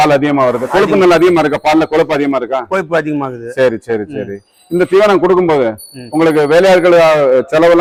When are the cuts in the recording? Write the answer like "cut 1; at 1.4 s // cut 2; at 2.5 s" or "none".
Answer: none